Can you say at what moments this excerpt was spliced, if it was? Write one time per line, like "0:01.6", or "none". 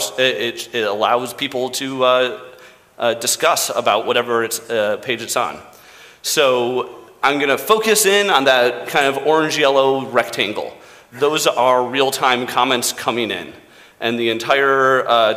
none